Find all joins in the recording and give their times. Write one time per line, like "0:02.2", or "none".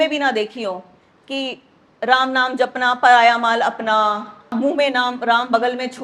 0:04.5

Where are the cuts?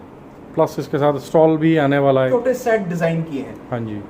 0:02.3

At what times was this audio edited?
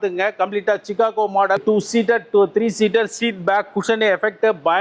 0:01.6

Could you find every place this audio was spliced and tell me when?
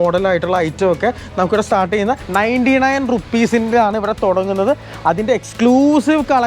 0:02.2

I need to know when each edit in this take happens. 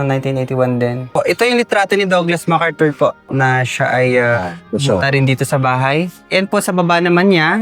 0:01.1
0:03.3
0:04.6

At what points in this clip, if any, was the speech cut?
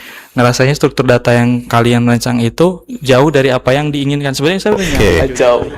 0:04.9

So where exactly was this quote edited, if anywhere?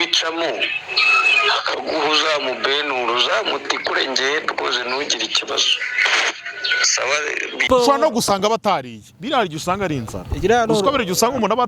0:07.5

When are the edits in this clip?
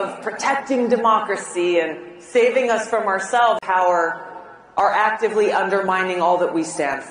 none

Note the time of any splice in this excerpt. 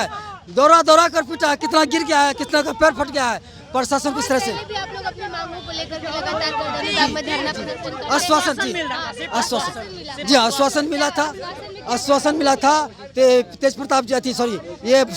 none

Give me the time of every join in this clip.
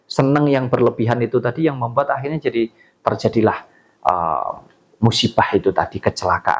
none

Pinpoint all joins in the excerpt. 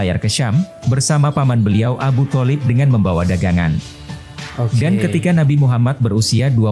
none

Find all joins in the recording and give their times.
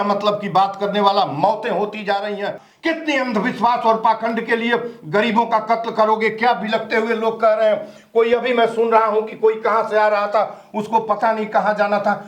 0:02.6

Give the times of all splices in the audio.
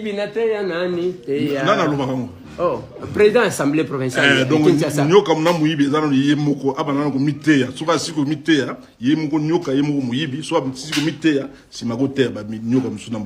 none

